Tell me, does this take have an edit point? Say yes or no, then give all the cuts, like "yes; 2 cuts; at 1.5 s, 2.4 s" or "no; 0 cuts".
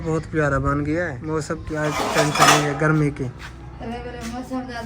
yes; 1 cut; at 1.2 s